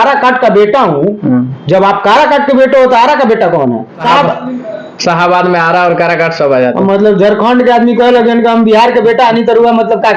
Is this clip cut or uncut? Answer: cut